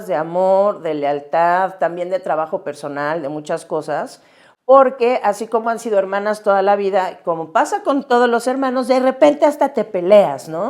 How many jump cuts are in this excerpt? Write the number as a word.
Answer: zero